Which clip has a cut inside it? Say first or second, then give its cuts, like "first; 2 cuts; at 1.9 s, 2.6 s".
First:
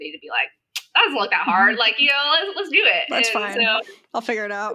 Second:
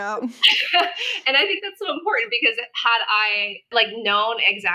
second; 1 cut; at 3.7 s